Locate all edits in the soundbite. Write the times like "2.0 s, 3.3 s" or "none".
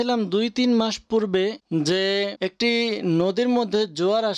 1.6 s, 2.3 s